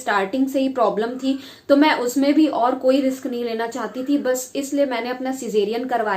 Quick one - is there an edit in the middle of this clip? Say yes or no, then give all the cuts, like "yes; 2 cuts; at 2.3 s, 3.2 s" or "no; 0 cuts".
no; 0 cuts